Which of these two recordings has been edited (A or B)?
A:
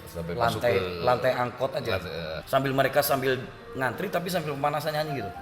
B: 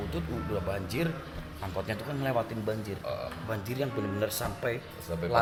A